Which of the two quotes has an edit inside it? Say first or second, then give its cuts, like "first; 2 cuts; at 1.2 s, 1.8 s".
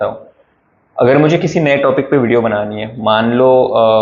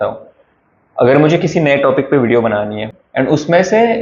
second; 1 cut; at 2.9 s